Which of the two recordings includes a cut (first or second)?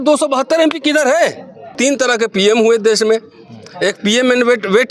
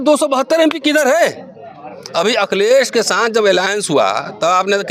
first